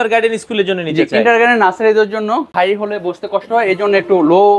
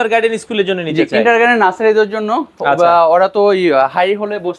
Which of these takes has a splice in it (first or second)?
first